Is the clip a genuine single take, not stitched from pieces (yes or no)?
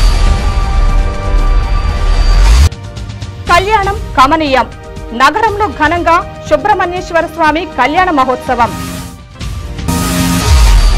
no